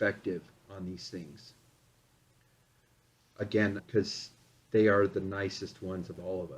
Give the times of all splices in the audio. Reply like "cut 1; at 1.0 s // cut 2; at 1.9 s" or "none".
cut 1; at 3.8 s